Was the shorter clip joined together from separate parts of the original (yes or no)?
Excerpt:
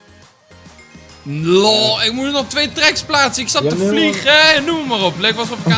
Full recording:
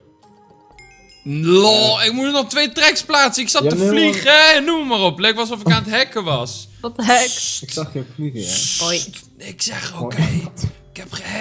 no